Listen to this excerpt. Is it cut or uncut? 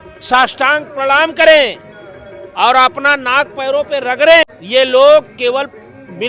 cut